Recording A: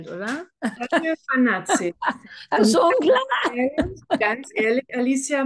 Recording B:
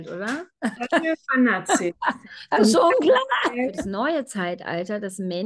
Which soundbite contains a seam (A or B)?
B